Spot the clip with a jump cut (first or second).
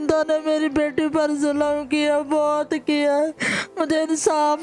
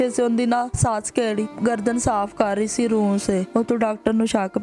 second